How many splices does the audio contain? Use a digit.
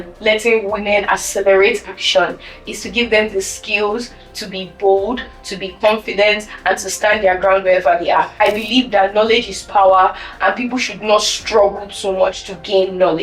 1